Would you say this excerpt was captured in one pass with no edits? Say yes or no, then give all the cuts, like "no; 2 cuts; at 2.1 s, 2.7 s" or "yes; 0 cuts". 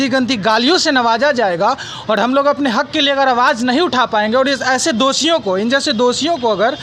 yes; 0 cuts